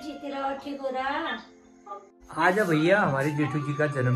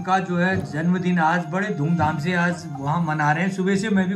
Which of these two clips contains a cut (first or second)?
first